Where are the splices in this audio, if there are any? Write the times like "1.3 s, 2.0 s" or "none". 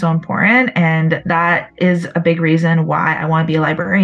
1.2 s